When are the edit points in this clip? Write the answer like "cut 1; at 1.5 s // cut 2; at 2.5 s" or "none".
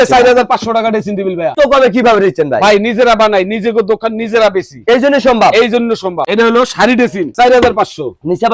cut 1; at 1.5 s // cut 2; at 6.2 s // cut 3; at 7.3 s